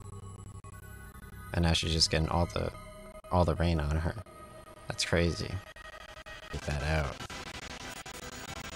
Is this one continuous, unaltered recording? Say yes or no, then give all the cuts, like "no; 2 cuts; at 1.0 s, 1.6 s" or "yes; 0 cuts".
no; 1 cut; at 6.5 s